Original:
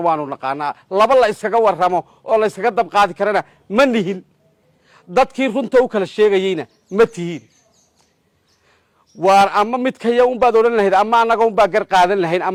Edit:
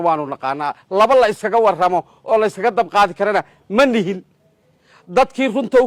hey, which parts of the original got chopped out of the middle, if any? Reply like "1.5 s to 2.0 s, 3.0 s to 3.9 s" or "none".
none